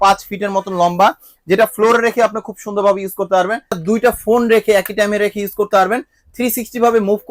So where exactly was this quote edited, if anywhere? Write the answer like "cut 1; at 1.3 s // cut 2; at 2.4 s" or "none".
cut 1; at 3.8 s